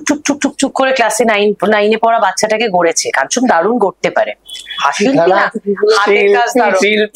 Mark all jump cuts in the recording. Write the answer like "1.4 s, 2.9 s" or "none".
none